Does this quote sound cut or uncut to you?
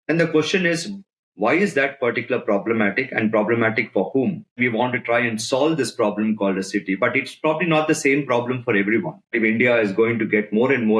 cut